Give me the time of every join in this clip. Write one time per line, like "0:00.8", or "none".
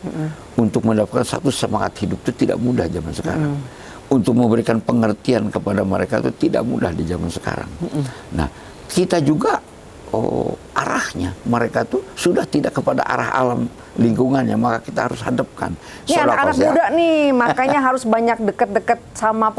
0:15.9